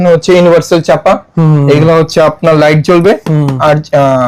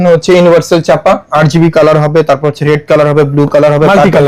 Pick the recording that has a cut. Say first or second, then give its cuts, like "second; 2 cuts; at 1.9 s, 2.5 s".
second; 1 cut; at 1.3 s